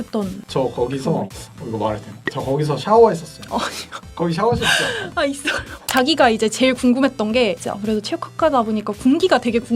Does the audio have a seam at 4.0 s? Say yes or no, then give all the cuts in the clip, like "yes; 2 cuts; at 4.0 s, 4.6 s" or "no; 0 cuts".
no; 1 cut; at 5.8 s